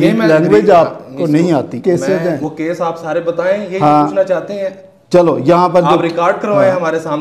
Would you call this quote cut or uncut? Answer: cut